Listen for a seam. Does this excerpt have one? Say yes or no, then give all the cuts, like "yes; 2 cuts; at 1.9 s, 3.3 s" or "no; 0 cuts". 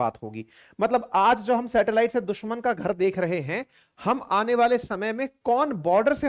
no; 0 cuts